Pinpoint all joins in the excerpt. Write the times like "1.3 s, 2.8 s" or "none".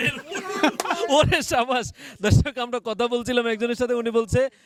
none

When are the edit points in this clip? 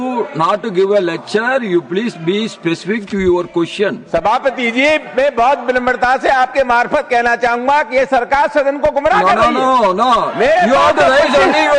none

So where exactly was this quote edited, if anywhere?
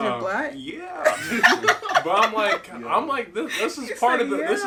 none

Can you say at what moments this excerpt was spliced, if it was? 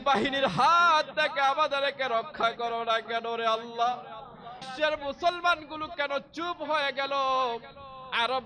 4.6 s

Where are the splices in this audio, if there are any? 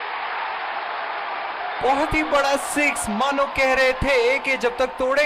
1.8 s

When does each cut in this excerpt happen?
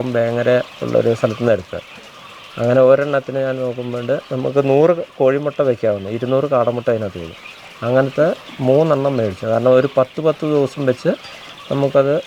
none

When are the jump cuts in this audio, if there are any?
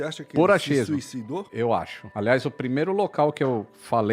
1.7 s

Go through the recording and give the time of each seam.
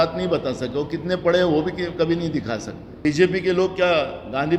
2.8 s

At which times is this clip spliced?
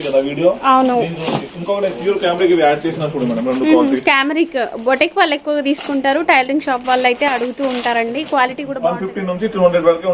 8.7 s

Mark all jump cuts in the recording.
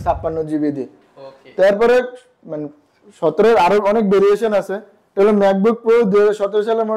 none

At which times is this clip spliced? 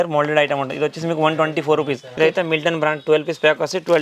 2.2 s

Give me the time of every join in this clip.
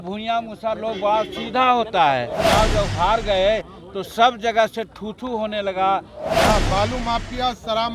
2.4 s, 6.2 s

